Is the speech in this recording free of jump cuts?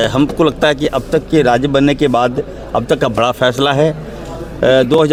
yes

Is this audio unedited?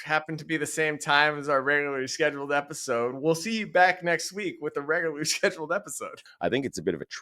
no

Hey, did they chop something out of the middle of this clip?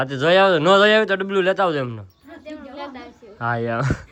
no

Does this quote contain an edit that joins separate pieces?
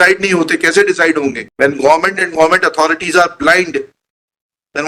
no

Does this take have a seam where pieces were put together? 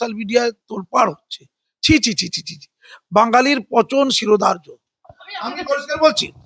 no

